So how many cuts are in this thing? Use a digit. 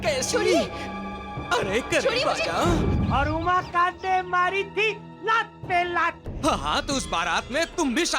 1